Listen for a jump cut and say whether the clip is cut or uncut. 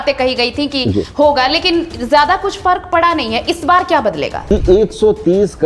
cut